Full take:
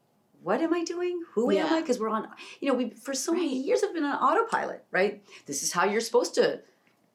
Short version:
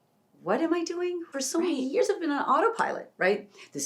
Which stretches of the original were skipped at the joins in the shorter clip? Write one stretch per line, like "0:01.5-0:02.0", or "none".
0:01.2-0:03.0